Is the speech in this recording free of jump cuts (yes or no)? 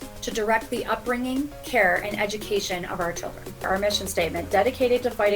no